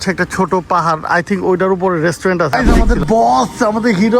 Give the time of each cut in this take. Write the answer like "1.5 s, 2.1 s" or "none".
2.5 s